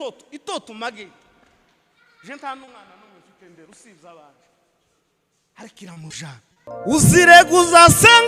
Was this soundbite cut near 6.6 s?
yes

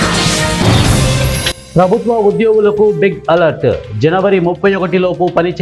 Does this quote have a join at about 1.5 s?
yes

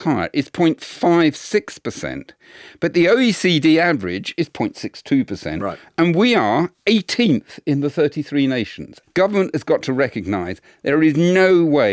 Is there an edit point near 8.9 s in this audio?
yes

